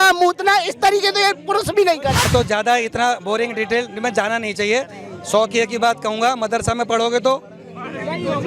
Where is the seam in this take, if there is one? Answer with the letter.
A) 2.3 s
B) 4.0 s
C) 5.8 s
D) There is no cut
A